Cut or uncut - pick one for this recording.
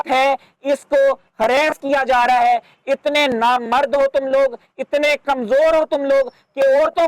uncut